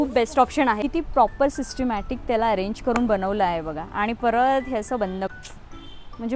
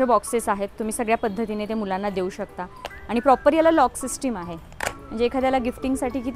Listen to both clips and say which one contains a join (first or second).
first